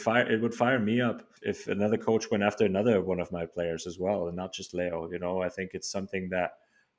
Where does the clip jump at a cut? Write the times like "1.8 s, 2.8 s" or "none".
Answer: 1.3 s